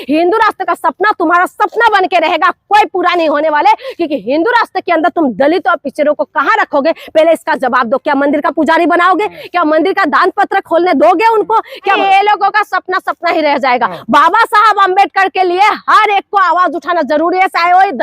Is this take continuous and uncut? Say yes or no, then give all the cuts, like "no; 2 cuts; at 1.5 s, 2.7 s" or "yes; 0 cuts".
no; 1 cut; at 12.0 s